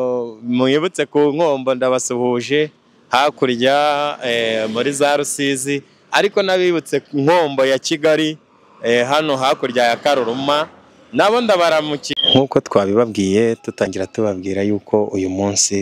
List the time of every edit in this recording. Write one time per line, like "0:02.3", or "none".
0:12.2